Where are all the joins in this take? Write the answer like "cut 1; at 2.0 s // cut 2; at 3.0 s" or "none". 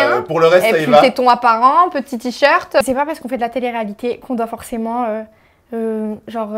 cut 1; at 2.8 s